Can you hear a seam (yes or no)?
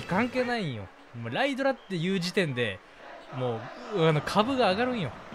no